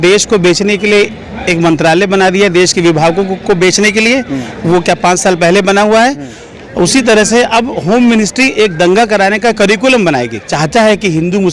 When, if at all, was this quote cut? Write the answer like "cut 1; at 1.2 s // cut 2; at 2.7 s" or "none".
cut 1; at 10.5 s